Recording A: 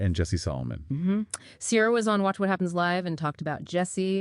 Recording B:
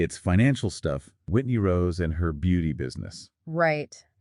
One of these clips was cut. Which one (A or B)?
B